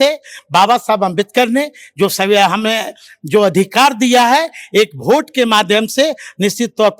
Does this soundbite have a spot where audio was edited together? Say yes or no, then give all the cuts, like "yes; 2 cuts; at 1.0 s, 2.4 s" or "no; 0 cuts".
no; 0 cuts